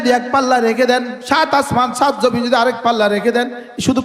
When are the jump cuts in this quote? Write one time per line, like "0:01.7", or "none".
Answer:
0:01.1

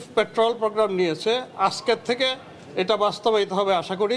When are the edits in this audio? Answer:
none

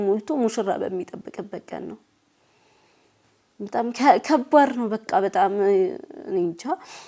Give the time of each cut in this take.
none

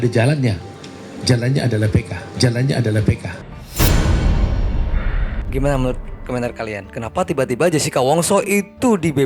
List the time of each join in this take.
0:05.4

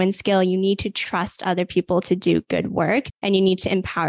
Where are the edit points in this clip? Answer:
0:03.1

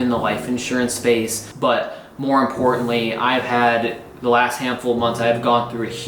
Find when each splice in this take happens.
0:01.4

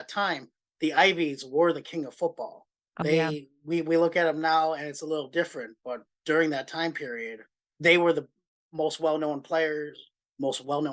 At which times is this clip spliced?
0:03.0

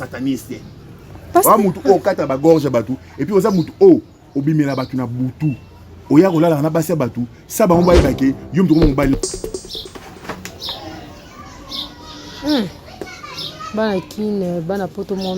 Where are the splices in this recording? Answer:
0:09.2

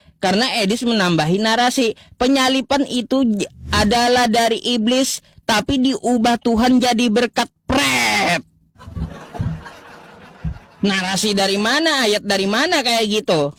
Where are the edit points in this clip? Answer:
none

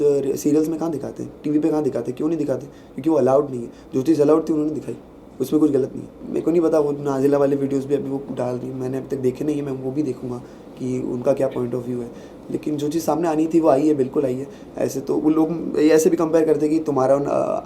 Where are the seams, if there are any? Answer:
0:06.2

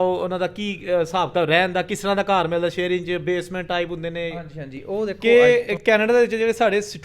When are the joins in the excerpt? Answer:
0:05.2

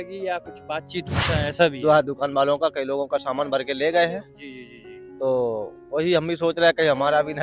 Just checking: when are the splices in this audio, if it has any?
0:01.1

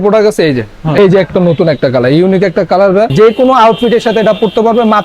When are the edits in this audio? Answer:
0:01.0
0:03.1

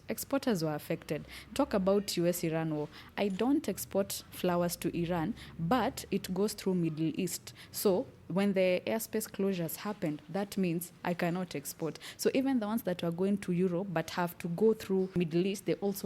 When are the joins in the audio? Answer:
0:15.1

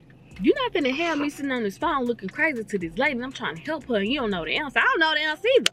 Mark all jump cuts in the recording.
none

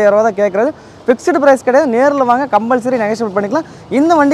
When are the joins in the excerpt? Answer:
none

